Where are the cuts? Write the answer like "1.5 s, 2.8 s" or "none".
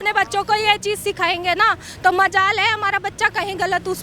none